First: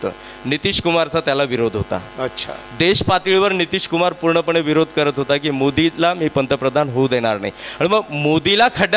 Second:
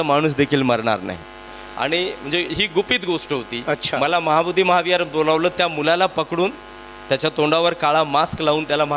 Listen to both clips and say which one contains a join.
second; 1 cut; at 1.5 s

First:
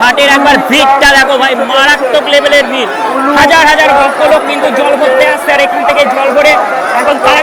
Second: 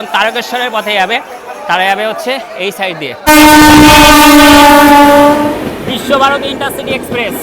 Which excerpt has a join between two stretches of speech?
second; 1 cut; at 3.3 s

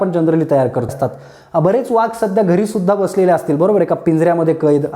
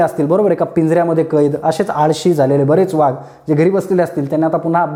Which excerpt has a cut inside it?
first; 1 cut; at 0.9 s

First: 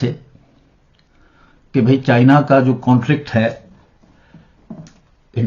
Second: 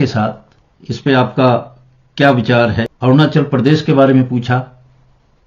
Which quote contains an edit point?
second; 1 cut; at 2.9 s

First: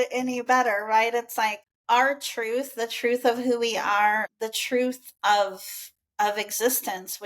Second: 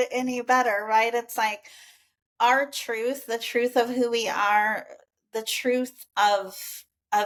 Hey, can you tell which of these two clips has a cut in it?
first; 2 cuts; at 1.7 s, 4.3 s

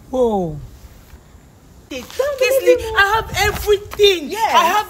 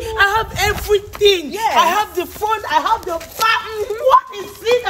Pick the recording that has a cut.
first; 1 cut; at 1.8 s

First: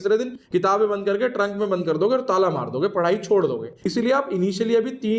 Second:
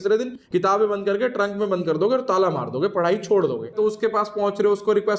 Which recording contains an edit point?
second; 1 cut; at 3.7 s

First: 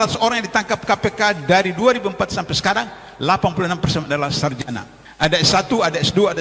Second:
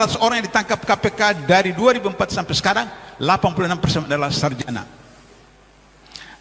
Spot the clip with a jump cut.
first; 1 cut; at 5.0 s

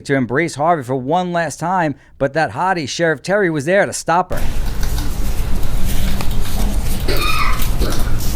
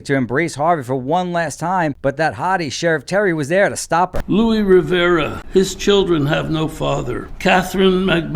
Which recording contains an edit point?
second; 4 cuts; at 2.0 s, 4.2 s, 5.4 s, 7.3 s

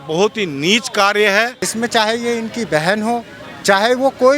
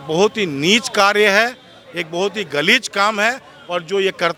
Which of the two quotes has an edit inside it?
first; 1 cut; at 1.6 s

